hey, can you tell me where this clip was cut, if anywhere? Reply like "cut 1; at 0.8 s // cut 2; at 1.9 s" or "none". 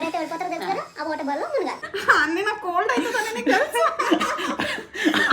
cut 1; at 1.8 s